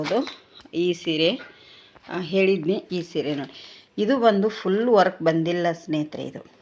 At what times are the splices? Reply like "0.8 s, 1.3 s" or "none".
2.8 s